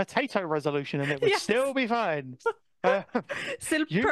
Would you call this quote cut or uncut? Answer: uncut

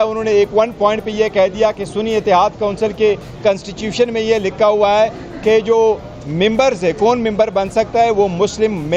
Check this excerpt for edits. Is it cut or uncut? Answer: uncut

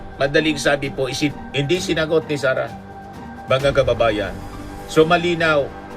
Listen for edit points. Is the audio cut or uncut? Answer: cut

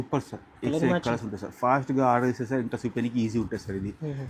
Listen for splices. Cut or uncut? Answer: uncut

